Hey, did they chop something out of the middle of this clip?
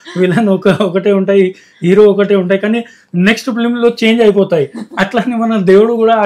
no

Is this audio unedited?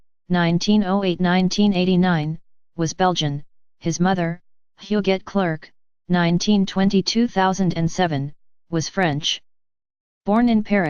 yes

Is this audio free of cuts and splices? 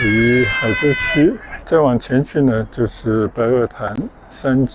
no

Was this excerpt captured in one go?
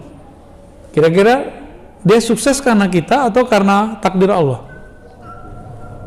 yes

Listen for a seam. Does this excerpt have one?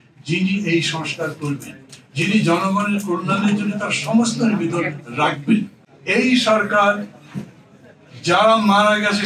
yes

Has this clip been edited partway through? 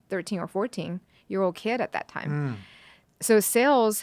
yes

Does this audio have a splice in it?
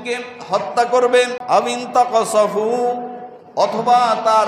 yes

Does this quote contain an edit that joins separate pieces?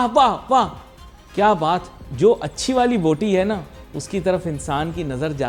no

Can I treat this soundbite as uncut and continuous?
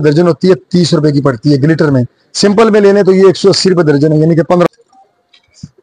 no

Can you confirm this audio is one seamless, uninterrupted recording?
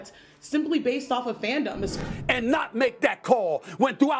no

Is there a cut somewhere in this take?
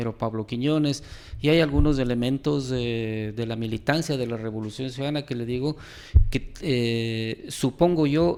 no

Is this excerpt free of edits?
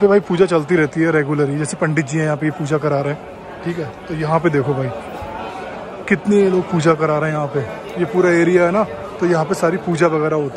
yes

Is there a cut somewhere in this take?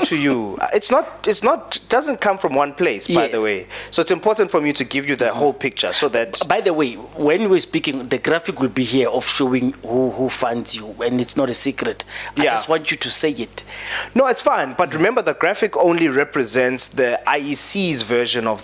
no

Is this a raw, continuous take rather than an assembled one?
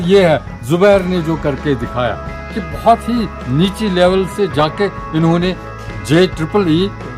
yes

